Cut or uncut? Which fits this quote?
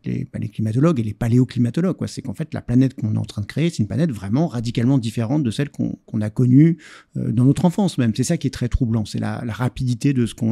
uncut